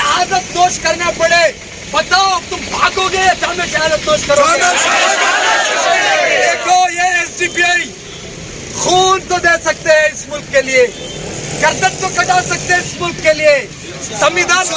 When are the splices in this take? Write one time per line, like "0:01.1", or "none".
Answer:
none